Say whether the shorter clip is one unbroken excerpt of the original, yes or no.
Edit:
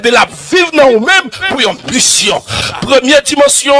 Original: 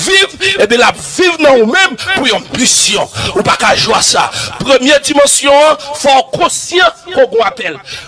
no